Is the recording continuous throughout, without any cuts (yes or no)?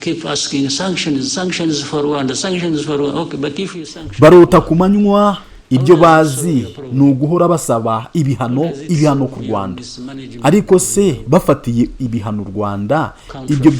no